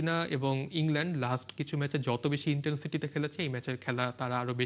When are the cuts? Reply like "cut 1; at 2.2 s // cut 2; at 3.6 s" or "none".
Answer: none